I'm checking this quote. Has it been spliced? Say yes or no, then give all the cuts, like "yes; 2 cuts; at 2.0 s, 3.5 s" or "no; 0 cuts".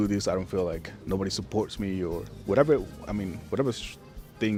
no; 0 cuts